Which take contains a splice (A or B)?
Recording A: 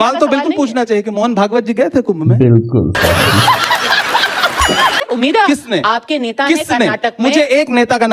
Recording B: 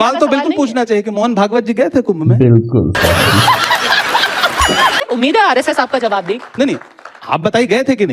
A